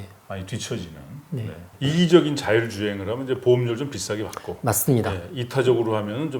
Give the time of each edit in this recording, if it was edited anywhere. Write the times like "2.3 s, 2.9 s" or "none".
1.7 s